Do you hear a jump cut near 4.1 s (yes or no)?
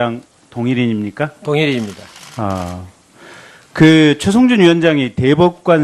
no